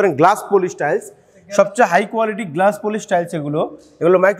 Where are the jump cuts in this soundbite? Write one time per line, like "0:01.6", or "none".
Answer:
none